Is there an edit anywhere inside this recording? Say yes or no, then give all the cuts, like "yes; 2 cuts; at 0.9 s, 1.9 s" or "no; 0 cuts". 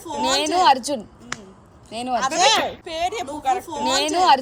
no; 0 cuts